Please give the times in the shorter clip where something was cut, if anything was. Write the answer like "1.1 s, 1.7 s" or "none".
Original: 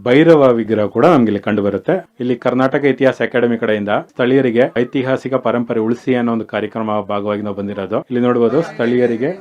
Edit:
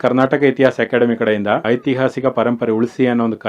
1.6 s